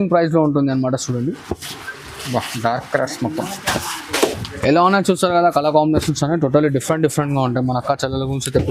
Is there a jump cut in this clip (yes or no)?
no